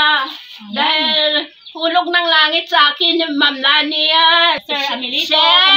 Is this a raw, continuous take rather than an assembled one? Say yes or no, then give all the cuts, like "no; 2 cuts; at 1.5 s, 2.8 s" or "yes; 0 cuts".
no; 1 cut; at 4.6 s